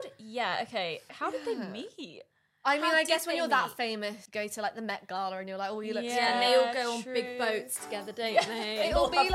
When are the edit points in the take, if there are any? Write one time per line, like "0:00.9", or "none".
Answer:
0:01.2
0:04.2